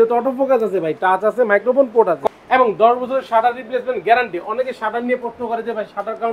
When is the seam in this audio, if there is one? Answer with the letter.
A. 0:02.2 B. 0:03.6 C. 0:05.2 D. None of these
A